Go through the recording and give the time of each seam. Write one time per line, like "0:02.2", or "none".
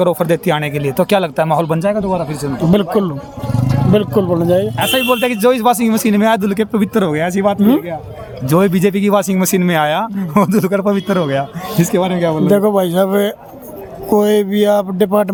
none